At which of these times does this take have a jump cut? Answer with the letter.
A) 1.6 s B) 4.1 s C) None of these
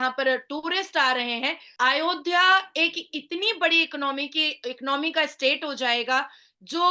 A